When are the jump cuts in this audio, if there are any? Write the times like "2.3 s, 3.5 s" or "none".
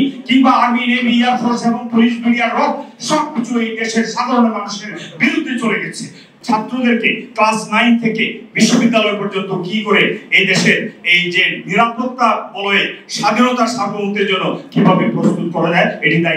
6.3 s

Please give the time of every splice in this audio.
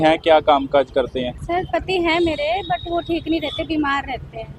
1.4 s

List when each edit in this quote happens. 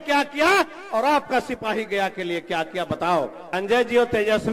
3.5 s

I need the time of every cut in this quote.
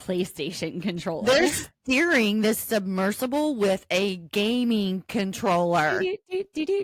none

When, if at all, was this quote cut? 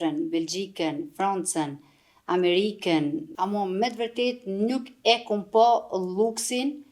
3.3 s

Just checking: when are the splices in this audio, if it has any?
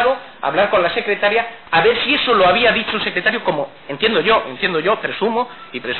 2.2 s

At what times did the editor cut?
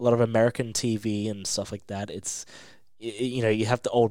none

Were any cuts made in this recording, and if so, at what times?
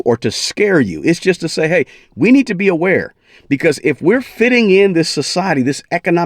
none

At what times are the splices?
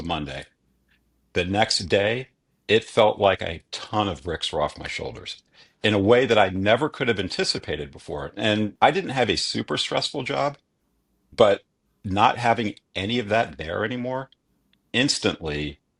8.7 s

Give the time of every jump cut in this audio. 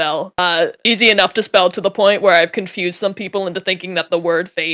none

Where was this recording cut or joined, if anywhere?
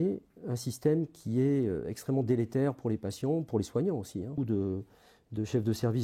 4.4 s

